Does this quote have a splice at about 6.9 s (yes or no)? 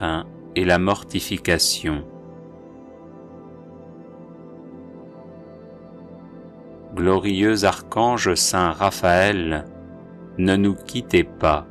yes